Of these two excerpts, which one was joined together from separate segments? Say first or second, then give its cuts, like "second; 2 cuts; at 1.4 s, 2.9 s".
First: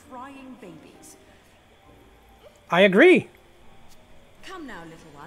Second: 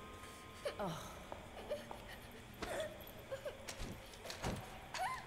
first; 1 cut; at 3.5 s